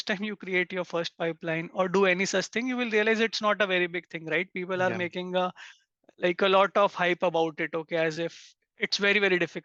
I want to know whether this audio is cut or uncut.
uncut